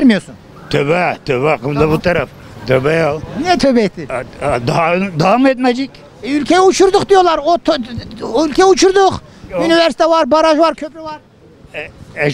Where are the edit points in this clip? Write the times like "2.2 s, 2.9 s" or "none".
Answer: none